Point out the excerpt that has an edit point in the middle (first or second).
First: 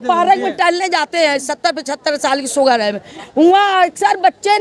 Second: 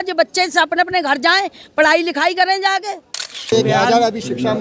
second